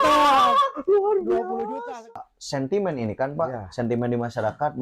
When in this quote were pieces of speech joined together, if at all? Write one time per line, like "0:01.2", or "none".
0:02.1